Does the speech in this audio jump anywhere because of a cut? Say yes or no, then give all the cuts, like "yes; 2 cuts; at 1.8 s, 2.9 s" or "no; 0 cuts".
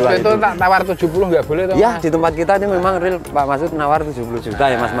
no; 0 cuts